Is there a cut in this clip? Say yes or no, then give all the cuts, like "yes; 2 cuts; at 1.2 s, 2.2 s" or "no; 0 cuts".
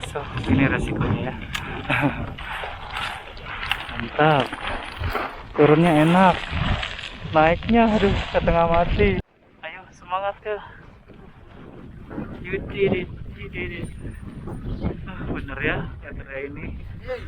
yes; 1 cut; at 9.2 s